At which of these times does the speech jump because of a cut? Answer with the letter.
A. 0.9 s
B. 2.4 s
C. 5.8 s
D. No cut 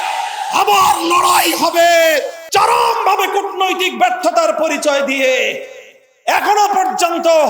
B